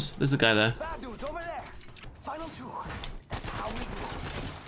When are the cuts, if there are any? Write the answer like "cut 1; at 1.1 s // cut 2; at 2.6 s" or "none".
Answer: cut 1; at 2.0 s